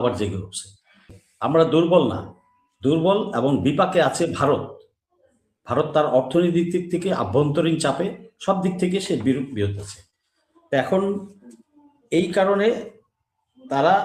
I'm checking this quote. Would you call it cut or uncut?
cut